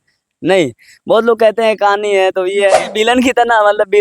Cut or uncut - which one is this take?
cut